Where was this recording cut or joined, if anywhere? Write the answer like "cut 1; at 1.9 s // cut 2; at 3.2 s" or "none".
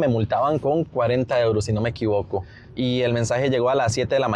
none